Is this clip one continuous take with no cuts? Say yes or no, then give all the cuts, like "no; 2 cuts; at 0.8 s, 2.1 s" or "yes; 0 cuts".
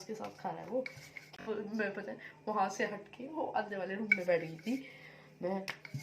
no; 1 cut; at 1.3 s